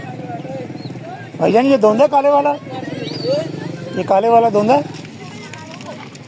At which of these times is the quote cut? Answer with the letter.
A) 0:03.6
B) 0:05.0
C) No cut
B